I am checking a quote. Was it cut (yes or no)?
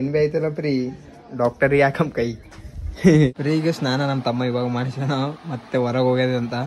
yes